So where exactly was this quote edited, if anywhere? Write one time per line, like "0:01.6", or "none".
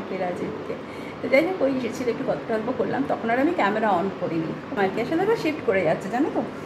none